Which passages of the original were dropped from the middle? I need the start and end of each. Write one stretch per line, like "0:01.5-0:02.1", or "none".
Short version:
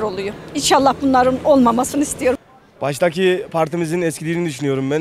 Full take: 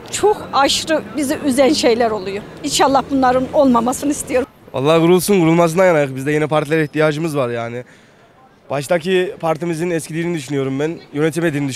0:04.6-0:08.4

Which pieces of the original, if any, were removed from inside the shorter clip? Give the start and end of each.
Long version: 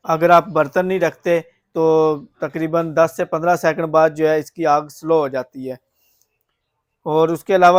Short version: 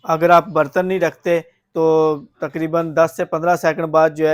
none

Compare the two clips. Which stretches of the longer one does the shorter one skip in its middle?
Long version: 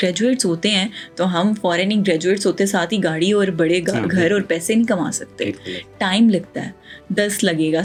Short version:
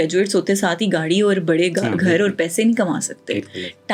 none

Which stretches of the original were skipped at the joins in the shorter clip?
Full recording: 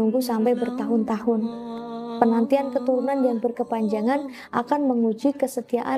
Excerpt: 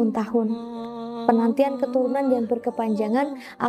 none

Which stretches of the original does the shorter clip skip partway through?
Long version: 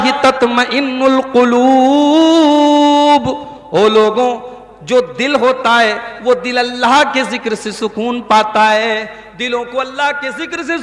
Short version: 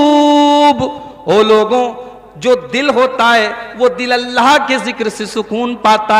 none

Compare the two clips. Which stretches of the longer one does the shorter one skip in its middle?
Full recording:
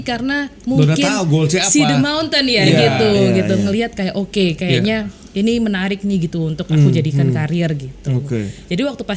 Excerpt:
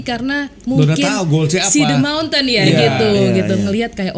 none

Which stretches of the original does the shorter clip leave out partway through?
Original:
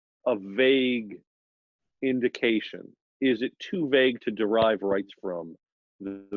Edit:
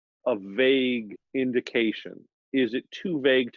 0:01.2-0:01.8

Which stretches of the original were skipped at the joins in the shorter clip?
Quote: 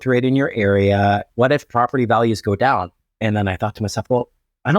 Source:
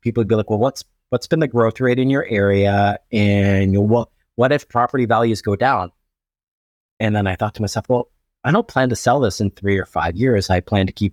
0:03.0-0:04.3
0:06.0-0:06.8

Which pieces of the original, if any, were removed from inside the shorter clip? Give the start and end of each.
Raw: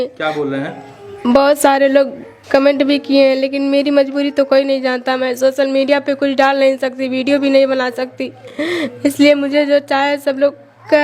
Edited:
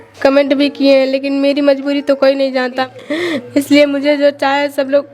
0:05.1-0:08.3

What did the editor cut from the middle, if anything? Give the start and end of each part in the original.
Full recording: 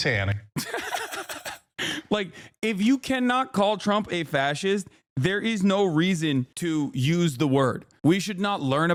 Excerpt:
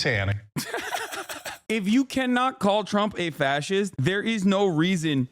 0:01.5-0:02.4
0:04.9-0:05.1

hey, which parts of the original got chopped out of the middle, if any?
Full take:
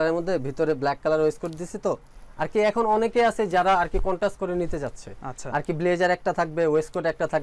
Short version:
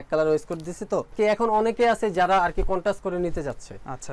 0:02.0-0:02.5

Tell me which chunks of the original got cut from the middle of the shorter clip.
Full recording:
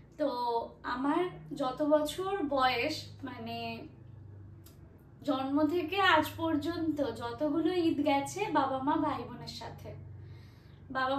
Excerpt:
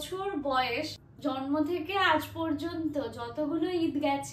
0:03.1-0:05.1

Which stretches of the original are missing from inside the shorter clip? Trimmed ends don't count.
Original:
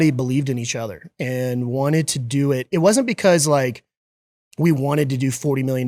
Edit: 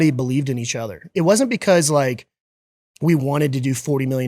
0:01.1-0:02.6

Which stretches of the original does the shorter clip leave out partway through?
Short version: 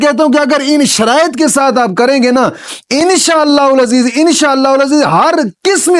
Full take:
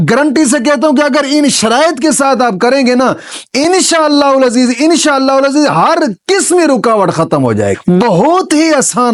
none

